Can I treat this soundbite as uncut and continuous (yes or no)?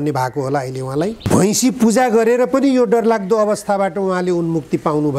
no